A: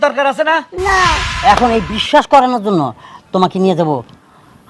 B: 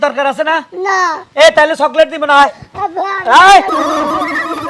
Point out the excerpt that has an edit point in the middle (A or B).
A